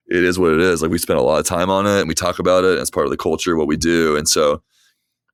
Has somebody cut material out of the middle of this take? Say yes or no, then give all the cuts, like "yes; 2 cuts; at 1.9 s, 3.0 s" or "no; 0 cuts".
no; 0 cuts